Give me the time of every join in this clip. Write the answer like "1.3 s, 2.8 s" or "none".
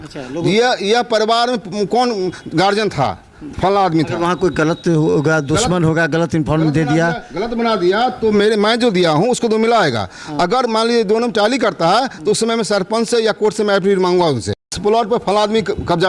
14.8 s